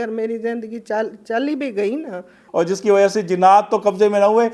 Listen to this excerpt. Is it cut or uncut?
cut